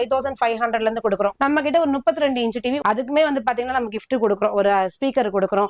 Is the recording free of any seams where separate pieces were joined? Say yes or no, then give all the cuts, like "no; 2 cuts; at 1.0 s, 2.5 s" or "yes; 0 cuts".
no; 2 cuts; at 1.4 s, 2.8 s